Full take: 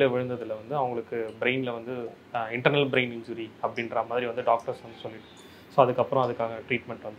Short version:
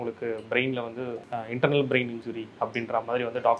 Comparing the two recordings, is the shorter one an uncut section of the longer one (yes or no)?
no